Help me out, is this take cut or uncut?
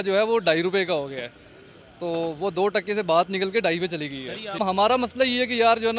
cut